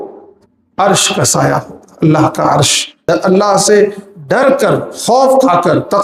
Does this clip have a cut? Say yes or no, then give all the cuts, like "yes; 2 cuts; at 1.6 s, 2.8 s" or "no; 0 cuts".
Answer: yes; 1 cut; at 3.1 s